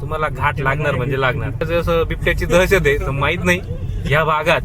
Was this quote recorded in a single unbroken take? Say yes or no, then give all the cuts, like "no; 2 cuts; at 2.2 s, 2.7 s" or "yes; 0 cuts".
no; 1 cut; at 1.6 s